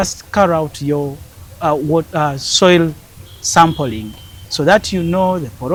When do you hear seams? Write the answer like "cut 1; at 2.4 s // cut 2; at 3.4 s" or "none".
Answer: none